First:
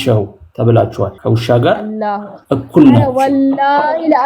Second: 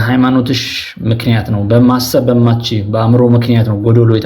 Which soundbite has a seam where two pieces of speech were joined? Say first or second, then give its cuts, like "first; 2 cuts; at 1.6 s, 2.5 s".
first; 1 cut; at 1.2 s